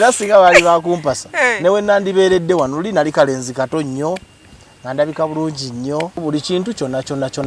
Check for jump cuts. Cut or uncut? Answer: cut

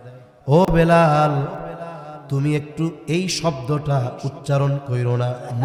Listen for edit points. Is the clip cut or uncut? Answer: uncut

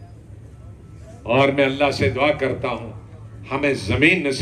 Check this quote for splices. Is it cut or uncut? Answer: uncut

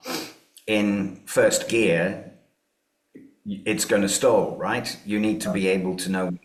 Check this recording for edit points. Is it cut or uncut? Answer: uncut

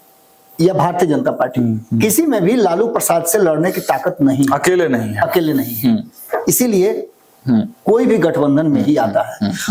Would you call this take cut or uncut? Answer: uncut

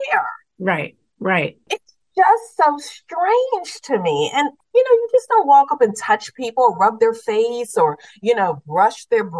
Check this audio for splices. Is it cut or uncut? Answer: uncut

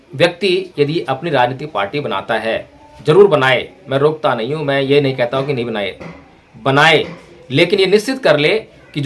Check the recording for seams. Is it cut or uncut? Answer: uncut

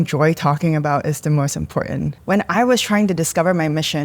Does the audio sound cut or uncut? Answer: cut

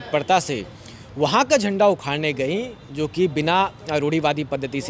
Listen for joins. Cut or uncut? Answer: uncut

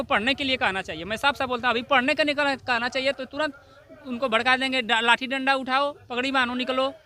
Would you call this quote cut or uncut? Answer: uncut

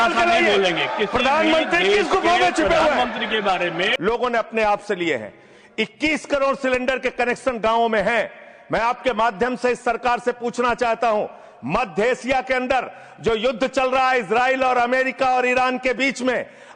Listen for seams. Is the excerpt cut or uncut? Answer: cut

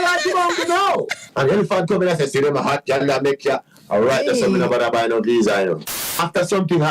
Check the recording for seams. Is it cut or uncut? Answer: cut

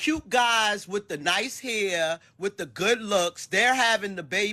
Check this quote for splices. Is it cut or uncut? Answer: uncut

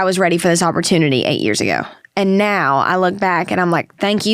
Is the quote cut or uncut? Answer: uncut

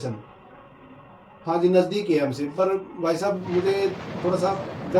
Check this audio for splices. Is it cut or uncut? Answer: uncut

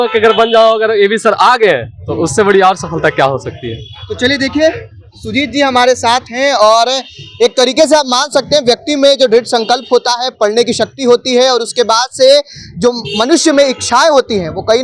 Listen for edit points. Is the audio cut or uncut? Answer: uncut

